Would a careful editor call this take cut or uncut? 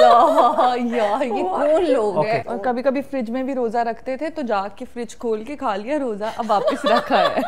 cut